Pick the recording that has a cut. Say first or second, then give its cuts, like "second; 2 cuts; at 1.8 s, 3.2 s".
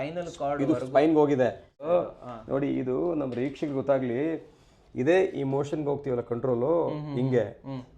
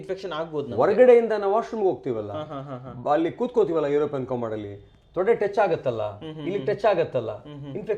first; 1 cut; at 1.9 s